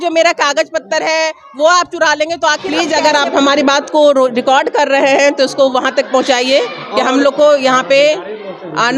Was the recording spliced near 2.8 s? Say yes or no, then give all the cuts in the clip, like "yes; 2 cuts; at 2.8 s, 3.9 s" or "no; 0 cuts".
yes; 1 cut; at 2.8 s